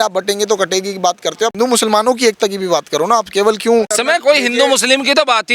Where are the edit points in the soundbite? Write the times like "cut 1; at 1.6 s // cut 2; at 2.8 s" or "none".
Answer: cut 1; at 1.5 s // cut 2; at 3.9 s